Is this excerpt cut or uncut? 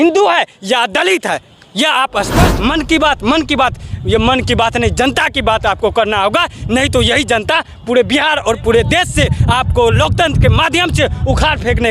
cut